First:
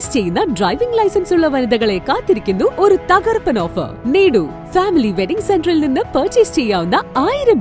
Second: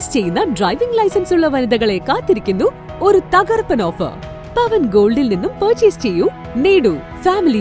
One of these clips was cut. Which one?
first; 2 cuts; at 2.7 s, 4.0 s

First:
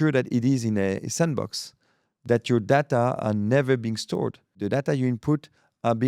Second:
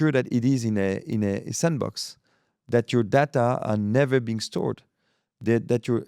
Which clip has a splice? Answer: first; 2 cuts; at 1.0 s, 4.6 s

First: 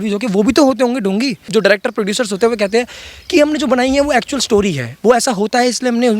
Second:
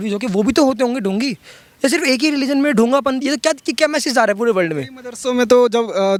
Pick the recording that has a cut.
first; 1 cut; at 1.4 s

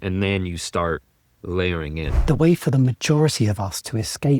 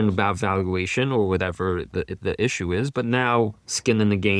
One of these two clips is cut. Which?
first; 1 cut; at 2.2 s

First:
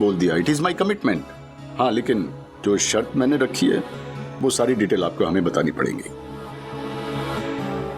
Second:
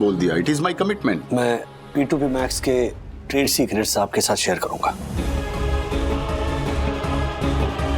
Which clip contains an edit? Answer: second; 1 cut; at 1.2 s

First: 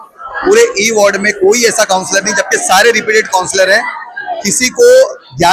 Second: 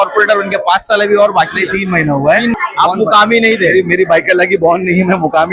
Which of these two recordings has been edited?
second; 1 cut; at 2.5 s

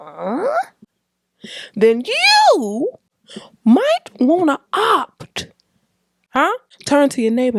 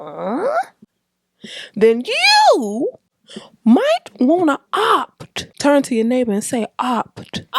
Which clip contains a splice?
second; 1 cut; at 5.4 s

